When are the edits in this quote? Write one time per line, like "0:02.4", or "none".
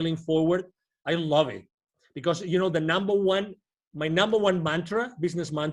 none